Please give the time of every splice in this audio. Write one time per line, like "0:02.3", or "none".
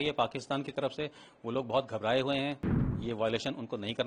0:02.9